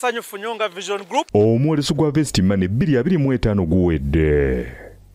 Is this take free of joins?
no; 1 cut; at 1.3 s

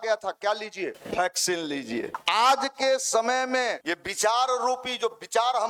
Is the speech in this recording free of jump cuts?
no; 3 cuts; at 1.0 s, 2.1 s, 3.8 s

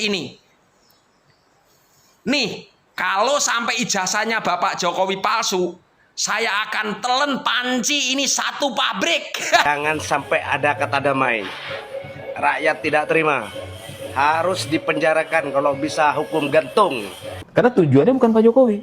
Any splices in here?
yes; 2 cuts; at 9.7 s, 17.2 s

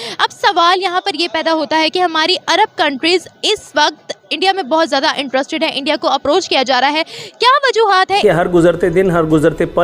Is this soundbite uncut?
no; 1 cut; at 8.2 s

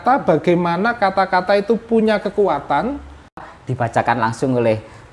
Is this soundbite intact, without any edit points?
no; 1 cut; at 3.4 s

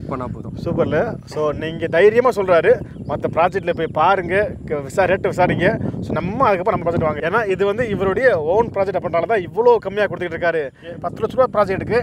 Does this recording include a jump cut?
yes; 1 cut; at 10.9 s

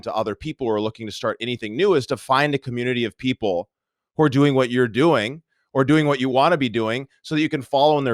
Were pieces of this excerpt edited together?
no; 0 cuts

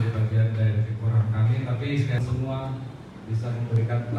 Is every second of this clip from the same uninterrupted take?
no; 1 cut; at 2.2 s

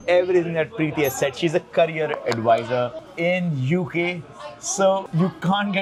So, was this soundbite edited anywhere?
no; 0 cuts

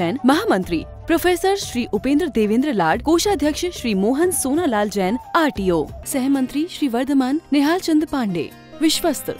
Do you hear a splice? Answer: no; 0 cuts

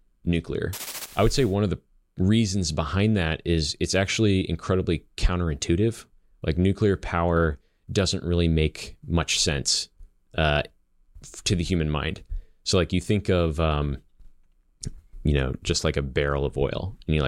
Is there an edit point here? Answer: yes; 1 cut; at 1.0 s

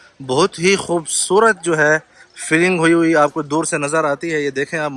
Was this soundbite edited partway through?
no; 0 cuts

